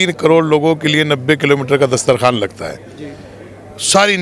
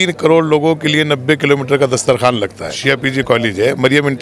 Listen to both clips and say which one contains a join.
second; 1 cut; at 2.7 s

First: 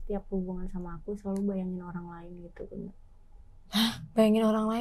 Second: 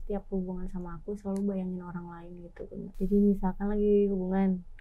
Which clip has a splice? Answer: second; 1 cut; at 2.9 s

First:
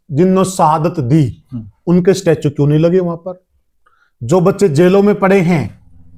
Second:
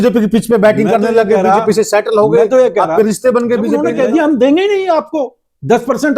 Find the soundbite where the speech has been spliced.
second; 1 cut; at 3.8 s

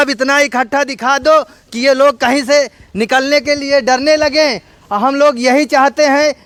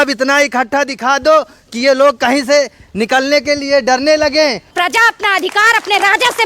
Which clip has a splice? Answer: second; 1 cut; at 4.7 s

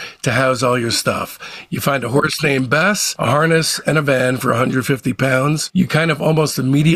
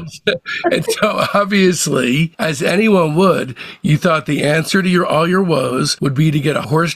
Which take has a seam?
first; 1 cut; at 5.7 s

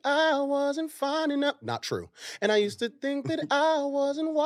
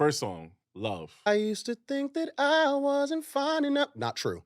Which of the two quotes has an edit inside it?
second; 1 cut; at 1.3 s

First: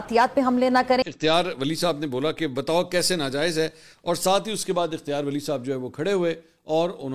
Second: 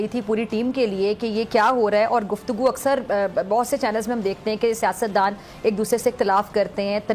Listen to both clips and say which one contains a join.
first; 1 cut; at 1.1 s

